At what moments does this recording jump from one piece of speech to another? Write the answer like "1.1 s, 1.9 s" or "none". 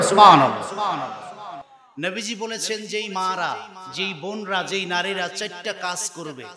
1.6 s